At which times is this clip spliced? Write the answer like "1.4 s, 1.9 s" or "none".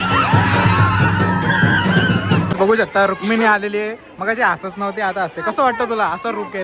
2.5 s